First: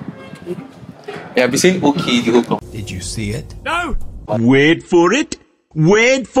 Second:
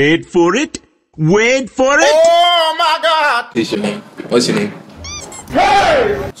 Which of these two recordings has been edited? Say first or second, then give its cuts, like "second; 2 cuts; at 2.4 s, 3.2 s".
second; 1 cut; at 3.8 s